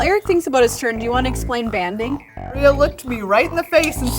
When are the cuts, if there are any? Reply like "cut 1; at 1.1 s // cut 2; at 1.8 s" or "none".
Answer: cut 1; at 2.6 s